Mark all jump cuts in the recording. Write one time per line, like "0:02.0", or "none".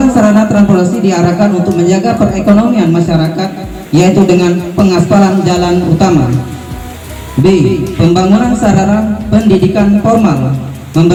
none